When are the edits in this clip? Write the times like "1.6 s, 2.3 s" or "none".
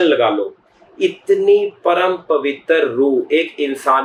none